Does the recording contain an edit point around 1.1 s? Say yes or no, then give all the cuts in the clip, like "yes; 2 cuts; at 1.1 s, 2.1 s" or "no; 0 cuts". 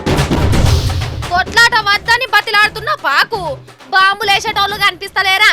yes; 1 cut; at 1.1 s